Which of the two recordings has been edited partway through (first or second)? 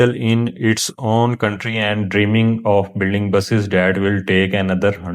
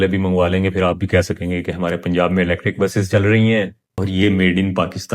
second